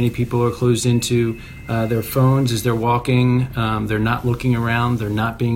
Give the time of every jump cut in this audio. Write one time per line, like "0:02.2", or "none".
none